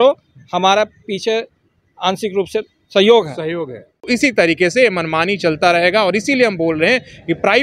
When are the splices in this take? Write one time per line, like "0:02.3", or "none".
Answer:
0:04.0